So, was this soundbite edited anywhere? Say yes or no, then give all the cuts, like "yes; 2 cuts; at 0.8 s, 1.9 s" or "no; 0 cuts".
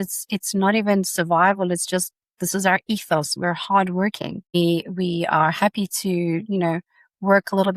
yes; 1 cut; at 4.5 s